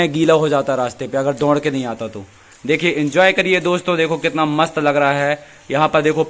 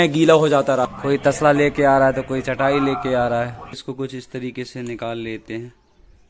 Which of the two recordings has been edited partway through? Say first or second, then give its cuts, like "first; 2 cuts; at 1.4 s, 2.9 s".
second; 2 cuts; at 0.9 s, 3.8 s